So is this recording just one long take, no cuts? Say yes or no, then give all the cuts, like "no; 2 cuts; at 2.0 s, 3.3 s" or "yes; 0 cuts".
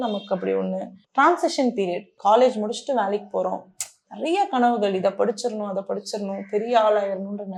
yes; 0 cuts